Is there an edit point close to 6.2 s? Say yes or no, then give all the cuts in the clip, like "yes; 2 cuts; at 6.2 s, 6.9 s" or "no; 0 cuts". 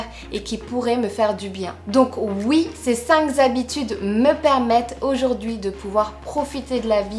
no; 1 cut; at 1.8 s